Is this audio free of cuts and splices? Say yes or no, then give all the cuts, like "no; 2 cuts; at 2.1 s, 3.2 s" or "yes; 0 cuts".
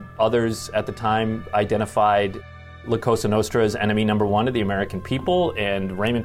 yes; 0 cuts